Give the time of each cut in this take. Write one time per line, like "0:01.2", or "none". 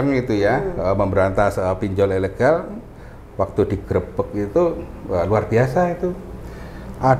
none